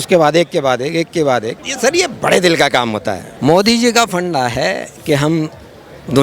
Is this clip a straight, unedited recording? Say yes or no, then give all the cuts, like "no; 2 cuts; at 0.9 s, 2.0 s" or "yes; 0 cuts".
no; 1 cut; at 1.6 s